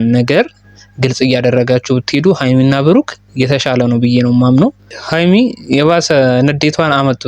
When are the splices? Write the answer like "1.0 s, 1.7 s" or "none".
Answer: 5.0 s